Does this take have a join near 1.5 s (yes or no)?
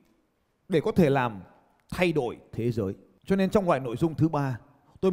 no